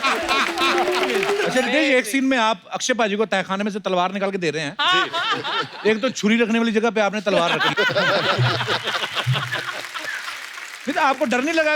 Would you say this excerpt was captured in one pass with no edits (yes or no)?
no